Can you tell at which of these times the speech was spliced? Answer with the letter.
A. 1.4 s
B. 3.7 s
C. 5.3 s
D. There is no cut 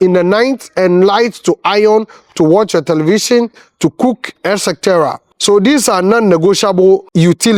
D